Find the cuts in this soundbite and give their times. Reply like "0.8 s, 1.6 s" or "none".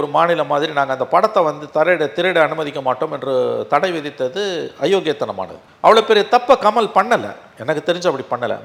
none